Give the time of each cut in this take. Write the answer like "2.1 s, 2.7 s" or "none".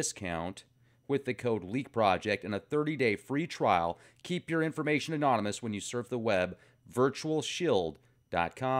7.5 s